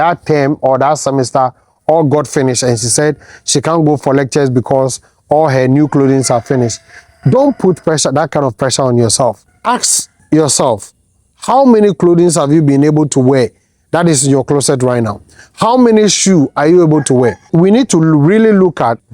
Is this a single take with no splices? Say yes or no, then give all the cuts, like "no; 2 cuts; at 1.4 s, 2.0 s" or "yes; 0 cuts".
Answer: no; 1 cut; at 17.4 s